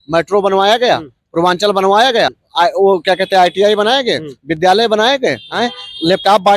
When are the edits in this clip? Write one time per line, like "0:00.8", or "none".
0:02.4
0:05.5